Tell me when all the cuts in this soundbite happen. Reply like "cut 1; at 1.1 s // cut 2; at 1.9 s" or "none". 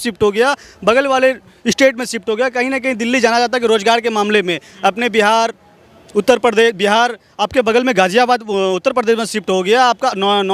none